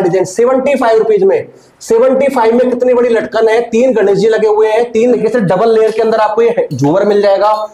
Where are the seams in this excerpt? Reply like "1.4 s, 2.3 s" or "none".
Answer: 5.2 s